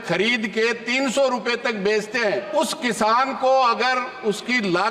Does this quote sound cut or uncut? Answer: cut